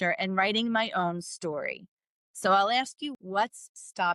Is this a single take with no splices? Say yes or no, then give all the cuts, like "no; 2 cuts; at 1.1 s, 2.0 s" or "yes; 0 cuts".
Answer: no; 1 cut; at 3.2 s